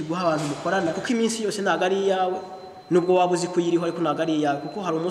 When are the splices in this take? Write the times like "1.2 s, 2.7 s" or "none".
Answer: 1.0 s